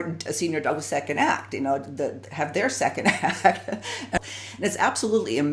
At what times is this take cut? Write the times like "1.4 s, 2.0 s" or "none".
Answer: 4.2 s